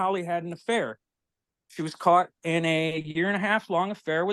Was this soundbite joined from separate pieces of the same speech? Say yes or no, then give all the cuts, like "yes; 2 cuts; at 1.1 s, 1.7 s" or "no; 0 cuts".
no; 0 cuts